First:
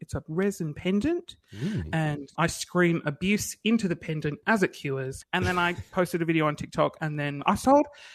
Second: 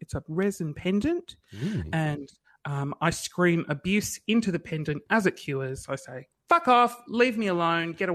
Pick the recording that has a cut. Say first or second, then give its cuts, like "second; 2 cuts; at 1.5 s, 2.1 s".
first; 3 cuts; at 2.3 s, 5.1 s, 7.4 s